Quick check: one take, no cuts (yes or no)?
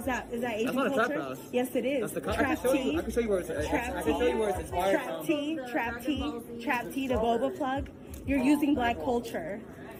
yes